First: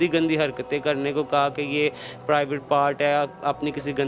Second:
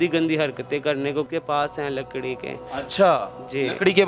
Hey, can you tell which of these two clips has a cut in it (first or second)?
second